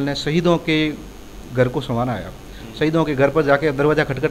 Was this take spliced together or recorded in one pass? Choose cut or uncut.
uncut